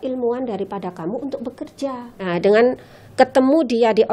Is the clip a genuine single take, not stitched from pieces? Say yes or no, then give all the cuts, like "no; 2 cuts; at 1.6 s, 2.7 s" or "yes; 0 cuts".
no; 1 cut; at 2.1 s